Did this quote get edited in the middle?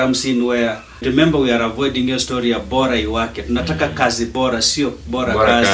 yes; 1 cut; at 1.0 s

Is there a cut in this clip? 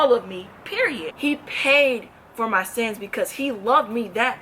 yes; 1 cut; at 1.0 s

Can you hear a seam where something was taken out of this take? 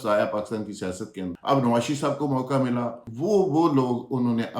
yes; 2 cuts; at 1.2 s, 3.0 s

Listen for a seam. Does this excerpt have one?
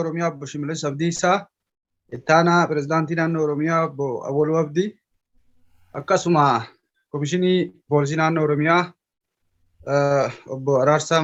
no; 0 cuts

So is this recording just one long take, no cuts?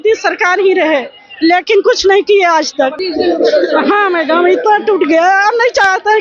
no; 1 cut; at 3.0 s

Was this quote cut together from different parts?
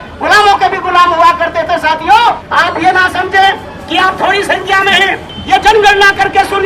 yes; 2 cuts; at 2.4 s, 5.3 s

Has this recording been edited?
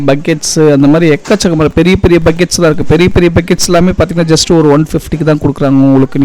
no; 0 cuts

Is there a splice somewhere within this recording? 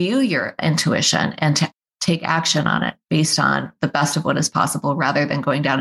no; 0 cuts

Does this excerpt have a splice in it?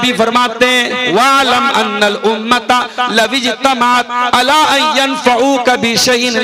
yes; 1 cut; at 1.1 s

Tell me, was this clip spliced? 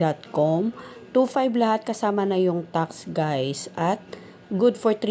no; 0 cuts

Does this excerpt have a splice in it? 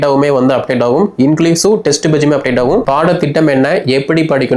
yes; 1 cut; at 2.8 s

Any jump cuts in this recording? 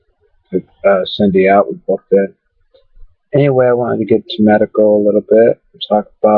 no; 0 cuts

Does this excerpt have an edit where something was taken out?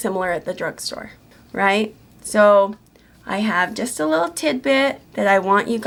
no; 0 cuts

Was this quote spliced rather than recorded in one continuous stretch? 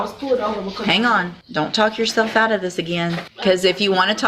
yes; 2 cuts; at 1.4 s, 3.3 s

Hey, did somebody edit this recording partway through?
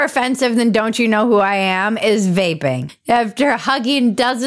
yes; 1 cut; at 2.9 s

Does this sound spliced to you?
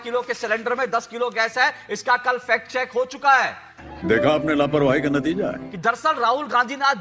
yes; 1 cut; at 5.7 s

